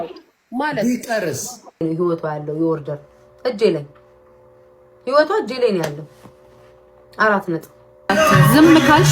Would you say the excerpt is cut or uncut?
cut